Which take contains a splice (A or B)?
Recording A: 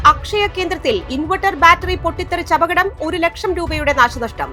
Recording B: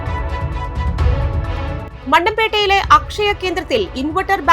B